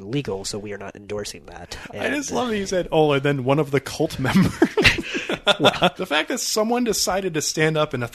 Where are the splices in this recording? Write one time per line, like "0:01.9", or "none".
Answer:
0:05.9